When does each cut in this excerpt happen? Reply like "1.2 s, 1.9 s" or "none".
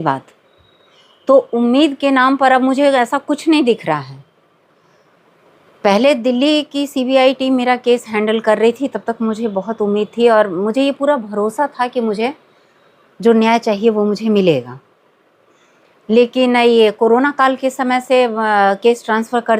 none